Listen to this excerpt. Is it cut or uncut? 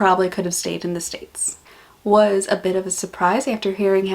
cut